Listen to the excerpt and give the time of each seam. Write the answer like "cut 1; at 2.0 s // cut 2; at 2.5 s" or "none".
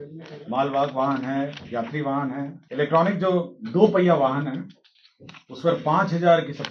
cut 1; at 2.6 s